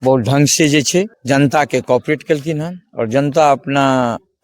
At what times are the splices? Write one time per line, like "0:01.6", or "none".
0:01.2